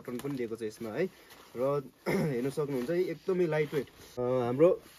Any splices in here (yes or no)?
yes